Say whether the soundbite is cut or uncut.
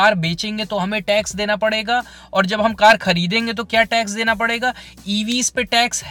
uncut